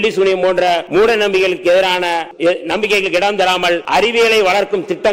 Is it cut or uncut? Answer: cut